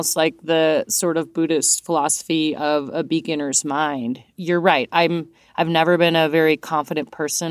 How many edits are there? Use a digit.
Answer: 0